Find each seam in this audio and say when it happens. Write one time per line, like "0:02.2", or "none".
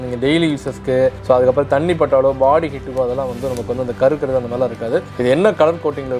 none